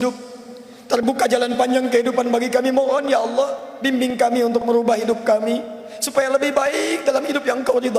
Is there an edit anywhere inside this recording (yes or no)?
no